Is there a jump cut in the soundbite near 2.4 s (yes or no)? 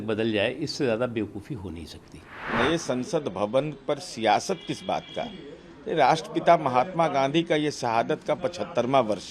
yes